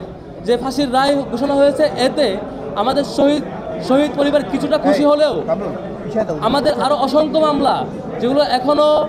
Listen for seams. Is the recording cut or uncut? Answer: uncut